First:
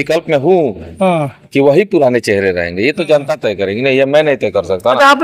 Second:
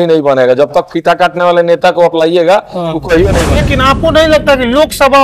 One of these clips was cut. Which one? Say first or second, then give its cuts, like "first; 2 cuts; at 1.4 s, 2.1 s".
second; 1 cut; at 3.5 s